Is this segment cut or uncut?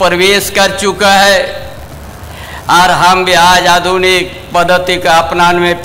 uncut